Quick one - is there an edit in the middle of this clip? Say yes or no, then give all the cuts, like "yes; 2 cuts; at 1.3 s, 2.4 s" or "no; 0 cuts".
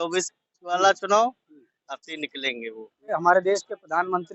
yes; 1 cut; at 3.1 s